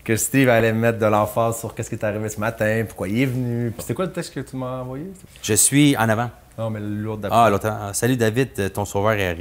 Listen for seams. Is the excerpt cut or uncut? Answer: cut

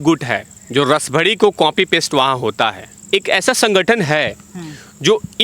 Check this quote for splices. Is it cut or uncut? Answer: cut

